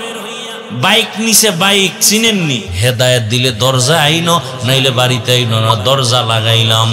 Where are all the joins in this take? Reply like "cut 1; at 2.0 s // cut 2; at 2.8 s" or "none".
cut 1; at 2.8 s